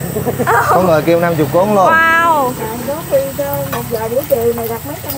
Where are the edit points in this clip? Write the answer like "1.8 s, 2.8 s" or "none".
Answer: none